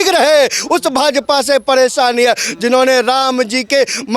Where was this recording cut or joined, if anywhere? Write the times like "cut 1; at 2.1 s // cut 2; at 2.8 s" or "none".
none